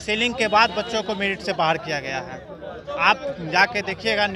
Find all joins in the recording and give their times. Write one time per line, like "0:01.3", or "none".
none